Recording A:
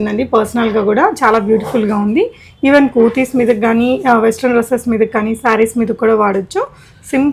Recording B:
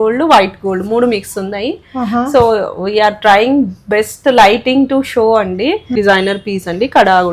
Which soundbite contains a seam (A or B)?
B